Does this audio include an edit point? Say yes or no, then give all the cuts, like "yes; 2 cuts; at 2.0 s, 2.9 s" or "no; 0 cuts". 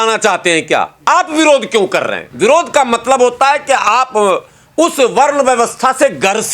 yes; 1 cut; at 2.2 s